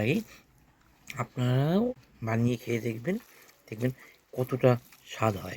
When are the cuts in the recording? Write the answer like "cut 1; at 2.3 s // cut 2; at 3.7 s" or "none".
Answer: cut 1; at 2.1 s